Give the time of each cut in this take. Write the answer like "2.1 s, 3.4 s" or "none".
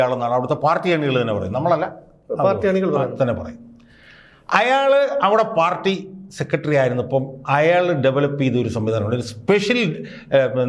none